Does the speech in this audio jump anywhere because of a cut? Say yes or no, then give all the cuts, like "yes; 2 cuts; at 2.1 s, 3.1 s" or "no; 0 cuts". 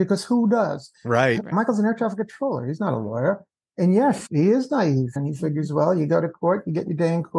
yes; 3 cuts; at 1.5 s, 4.2 s, 5.1 s